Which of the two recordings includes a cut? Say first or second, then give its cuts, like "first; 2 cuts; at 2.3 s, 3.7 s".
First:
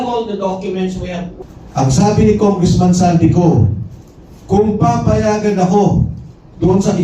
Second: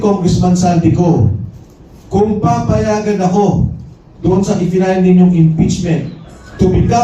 first; 1 cut; at 1.3 s